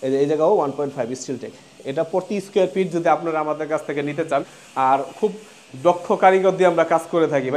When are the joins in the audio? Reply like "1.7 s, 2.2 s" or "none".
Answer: 4.6 s